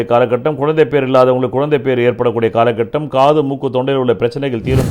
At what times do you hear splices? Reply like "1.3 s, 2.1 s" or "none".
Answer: none